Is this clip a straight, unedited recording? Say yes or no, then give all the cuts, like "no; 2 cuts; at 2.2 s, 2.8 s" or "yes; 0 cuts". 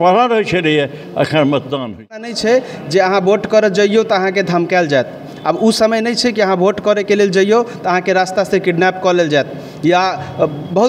no; 1 cut; at 2.3 s